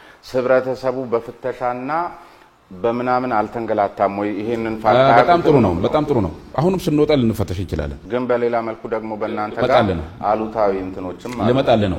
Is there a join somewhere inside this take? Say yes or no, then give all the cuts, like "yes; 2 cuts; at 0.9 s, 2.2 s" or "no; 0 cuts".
yes; 1 cut; at 8.0 s